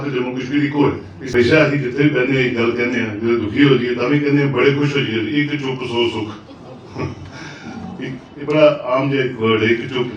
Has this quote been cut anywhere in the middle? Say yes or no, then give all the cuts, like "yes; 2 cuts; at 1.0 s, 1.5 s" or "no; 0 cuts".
yes; 1 cut; at 1.1 s